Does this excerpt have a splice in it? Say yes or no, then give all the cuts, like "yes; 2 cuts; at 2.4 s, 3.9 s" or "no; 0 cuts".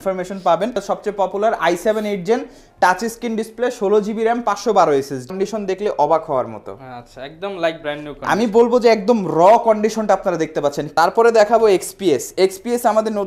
yes; 3 cuts; at 0.8 s, 5.3 s, 10.9 s